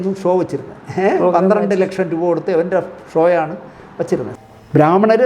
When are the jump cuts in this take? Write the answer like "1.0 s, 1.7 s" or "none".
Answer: 4.3 s

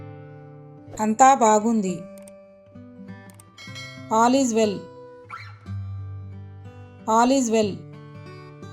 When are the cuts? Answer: 0.8 s, 2.0 s, 3.9 s, 4.8 s, 6.9 s, 7.8 s

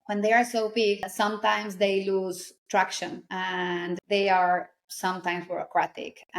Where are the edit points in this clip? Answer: 2.5 s, 3.2 s

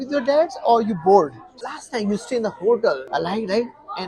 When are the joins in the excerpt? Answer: 1.7 s, 3.0 s

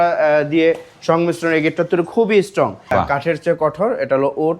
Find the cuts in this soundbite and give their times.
2.9 s

